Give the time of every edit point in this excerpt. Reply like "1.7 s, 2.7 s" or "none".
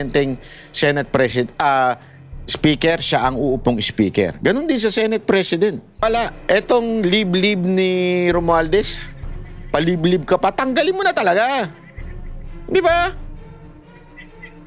6.0 s